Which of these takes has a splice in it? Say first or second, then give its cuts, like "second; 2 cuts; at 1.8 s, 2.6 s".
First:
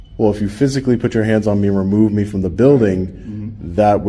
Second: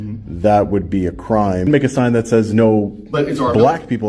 second; 1 cut; at 1.7 s